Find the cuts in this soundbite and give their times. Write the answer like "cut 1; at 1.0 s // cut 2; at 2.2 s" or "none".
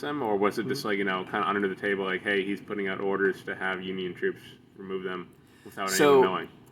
none